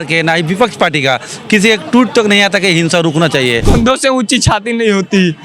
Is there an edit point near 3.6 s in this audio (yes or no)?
yes